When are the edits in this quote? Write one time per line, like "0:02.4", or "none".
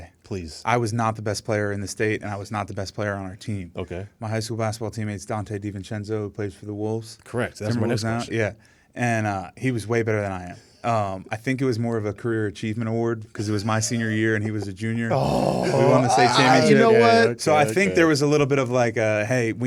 none